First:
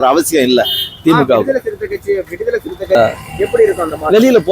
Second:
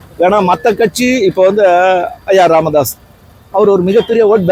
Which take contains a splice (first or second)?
first